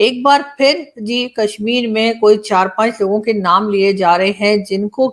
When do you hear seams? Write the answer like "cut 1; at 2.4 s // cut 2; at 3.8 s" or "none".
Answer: none